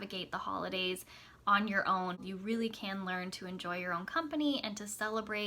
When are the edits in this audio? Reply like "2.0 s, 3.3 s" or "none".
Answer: 2.2 s

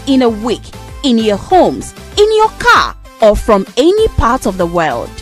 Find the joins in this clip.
none

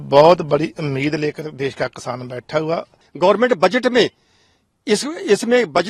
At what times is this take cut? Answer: 3.0 s

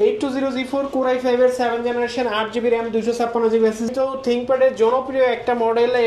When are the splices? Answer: 3.9 s

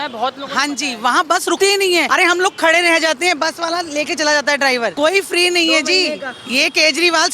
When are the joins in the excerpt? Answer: 1.7 s, 4.9 s

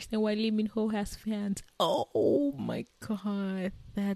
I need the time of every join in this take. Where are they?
none

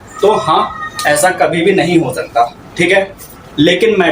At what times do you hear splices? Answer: none

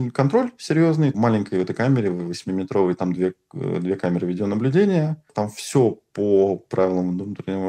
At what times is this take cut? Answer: none

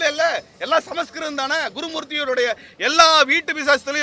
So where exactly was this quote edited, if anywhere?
none

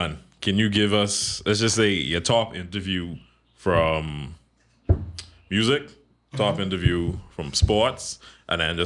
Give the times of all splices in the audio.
none

